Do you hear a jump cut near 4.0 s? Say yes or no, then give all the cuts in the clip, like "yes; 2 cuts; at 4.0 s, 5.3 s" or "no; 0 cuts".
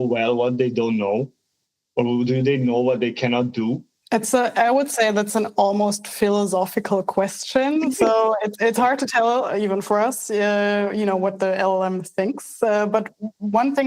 yes; 1 cut; at 4.0 s